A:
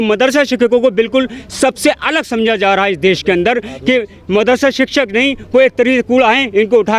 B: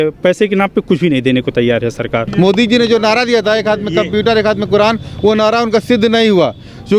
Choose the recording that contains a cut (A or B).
B